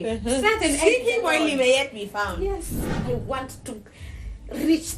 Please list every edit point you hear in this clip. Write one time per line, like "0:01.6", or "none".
0:03.0